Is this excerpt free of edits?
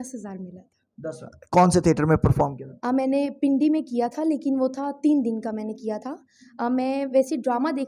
yes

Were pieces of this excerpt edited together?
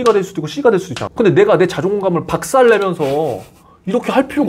yes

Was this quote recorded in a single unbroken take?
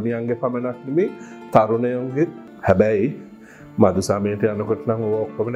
no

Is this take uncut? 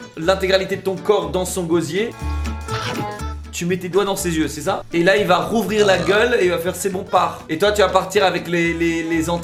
yes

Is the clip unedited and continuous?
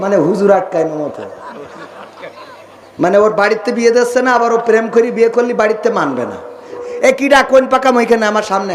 no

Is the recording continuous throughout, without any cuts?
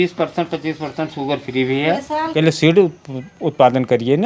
no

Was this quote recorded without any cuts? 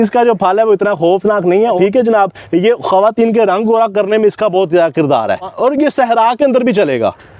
no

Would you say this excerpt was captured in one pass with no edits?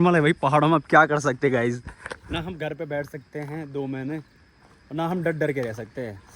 yes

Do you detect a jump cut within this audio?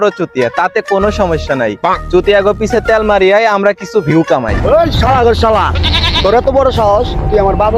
no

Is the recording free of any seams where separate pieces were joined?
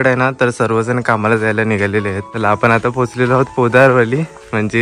no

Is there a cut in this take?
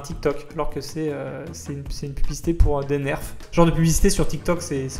yes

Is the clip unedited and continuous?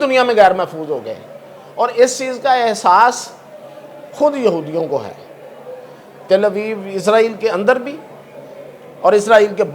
yes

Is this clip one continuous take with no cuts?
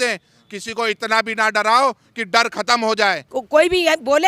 no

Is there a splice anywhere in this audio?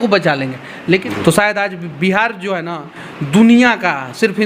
yes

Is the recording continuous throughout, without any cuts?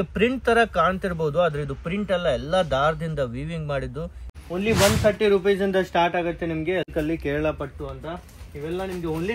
no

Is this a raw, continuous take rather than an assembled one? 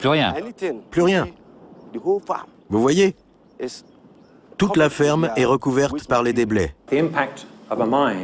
no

